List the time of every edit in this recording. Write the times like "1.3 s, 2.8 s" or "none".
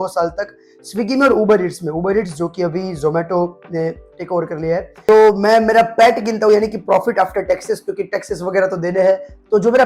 5.1 s